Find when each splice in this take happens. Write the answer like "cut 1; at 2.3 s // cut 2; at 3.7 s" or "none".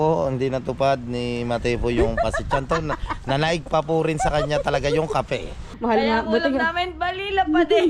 cut 1; at 5.6 s